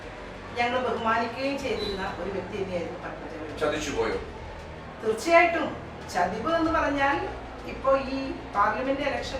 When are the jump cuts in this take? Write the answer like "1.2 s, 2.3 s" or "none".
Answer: none